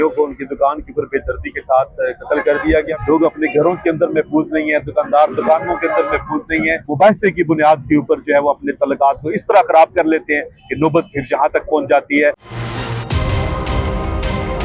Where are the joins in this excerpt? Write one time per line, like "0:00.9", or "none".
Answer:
0:02.9
0:06.8
0:12.5